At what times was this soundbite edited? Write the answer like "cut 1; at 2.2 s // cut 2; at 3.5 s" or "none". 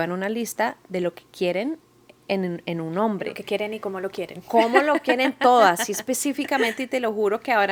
none